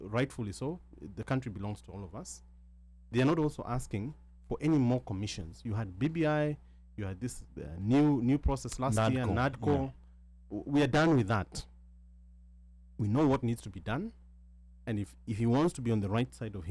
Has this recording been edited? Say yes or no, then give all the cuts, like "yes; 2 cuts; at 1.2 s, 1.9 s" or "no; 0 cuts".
no; 0 cuts